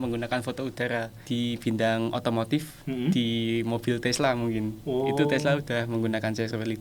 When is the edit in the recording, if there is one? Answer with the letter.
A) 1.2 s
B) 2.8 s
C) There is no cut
A